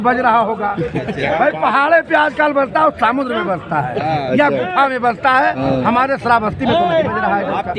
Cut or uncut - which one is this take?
uncut